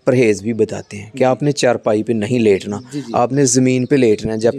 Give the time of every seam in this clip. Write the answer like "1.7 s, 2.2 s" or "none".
none